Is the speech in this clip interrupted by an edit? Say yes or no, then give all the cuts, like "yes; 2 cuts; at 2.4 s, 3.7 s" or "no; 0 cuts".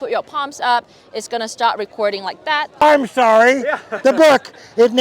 yes; 1 cut; at 2.7 s